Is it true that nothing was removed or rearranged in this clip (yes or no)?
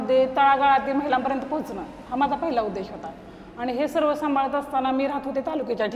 yes